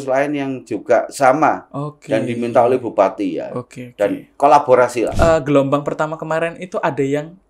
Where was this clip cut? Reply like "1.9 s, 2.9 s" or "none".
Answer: 5.1 s